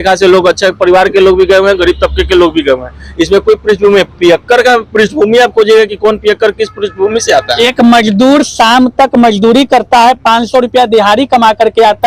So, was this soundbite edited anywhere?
no; 0 cuts

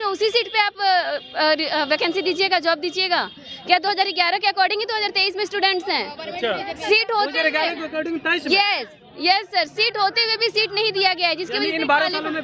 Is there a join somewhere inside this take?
no; 0 cuts

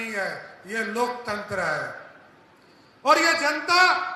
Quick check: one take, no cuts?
yes; 0 cuts

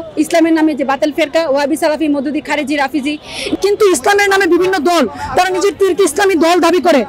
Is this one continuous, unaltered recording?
no; 1 cut; at 3.5 s

